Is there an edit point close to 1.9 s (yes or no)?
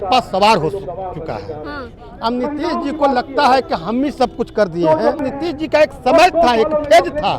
yes